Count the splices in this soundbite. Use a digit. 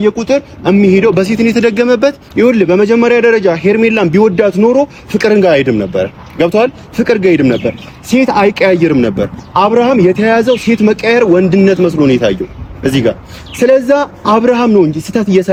0